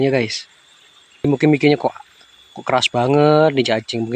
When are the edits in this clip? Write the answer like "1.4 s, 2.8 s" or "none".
1.2 s